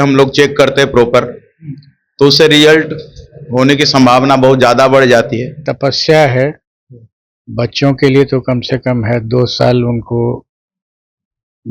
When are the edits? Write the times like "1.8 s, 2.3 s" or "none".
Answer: 5.6 s